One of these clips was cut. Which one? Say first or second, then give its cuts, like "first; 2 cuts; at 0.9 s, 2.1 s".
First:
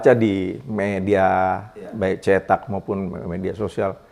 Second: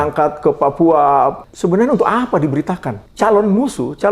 second; 2 cuts; at 1.4 s, 3.0 s